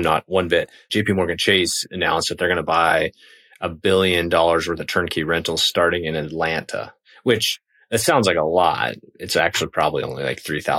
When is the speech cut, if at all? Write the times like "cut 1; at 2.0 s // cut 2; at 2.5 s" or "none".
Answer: cut 1; at 0.9 s